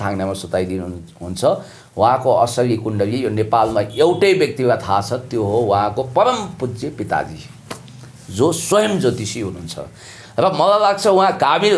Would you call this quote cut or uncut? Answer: uncut